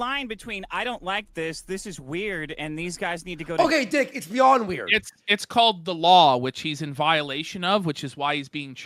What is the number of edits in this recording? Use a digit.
0